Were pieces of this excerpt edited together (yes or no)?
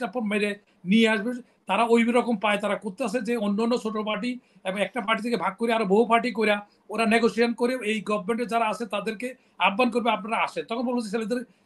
no